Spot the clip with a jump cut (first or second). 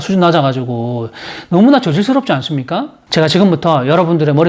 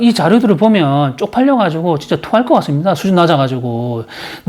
first